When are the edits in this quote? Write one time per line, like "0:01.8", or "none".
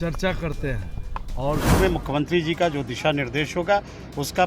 0:01.7